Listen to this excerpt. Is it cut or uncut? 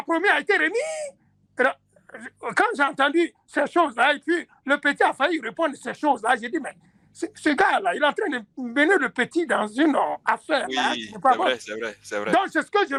uncut